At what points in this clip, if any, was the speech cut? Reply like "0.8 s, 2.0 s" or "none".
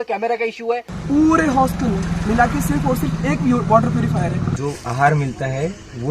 0.9 s, 4.5 s